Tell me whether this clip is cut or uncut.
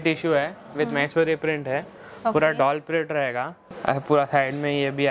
cut